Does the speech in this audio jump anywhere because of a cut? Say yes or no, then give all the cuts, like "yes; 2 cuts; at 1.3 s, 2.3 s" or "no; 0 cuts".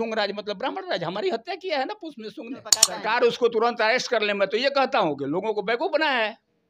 yes; 1 cut; at 2.9 s